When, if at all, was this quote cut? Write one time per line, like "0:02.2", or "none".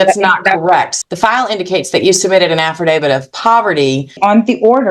0:00.9
0:04.2